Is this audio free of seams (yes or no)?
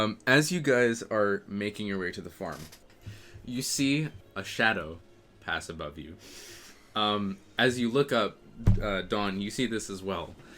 no